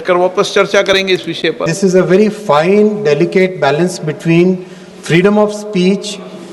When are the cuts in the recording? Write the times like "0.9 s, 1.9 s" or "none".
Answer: 1.7 s